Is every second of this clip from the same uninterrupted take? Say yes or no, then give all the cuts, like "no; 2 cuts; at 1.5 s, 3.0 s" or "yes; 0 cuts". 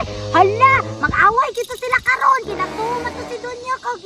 yes; 0 cuts